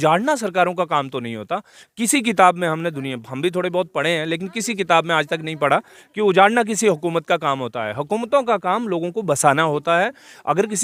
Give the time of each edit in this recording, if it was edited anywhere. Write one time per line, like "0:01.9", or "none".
none